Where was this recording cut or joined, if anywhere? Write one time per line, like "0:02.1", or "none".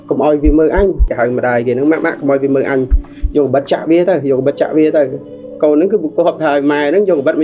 0:01.0